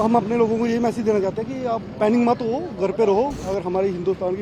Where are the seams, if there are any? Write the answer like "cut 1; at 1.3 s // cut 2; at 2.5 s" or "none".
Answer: cut 1; at 3.4 s

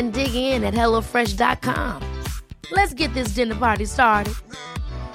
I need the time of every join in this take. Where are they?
none

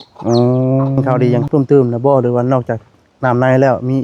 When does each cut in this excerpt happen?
cut 1; at 1.0 s

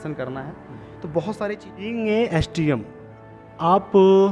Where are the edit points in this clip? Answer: cut 1; at 1.9 s

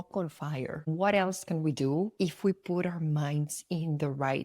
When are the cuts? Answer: cut 1; at 2.1 s

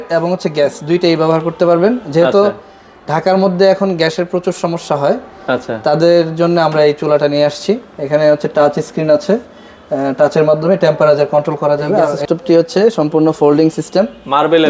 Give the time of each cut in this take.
cut 1; at 12.2 s

